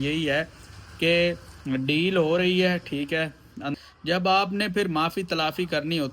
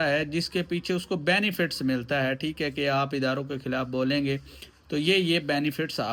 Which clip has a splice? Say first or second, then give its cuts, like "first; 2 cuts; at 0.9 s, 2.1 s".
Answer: first; 1 cut; at 3.7 s